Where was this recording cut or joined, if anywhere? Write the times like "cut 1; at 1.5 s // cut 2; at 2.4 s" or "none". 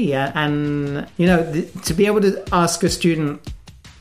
cut 1; at 1.0 s